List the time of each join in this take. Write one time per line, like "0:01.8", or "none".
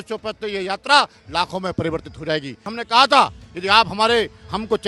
0:02.6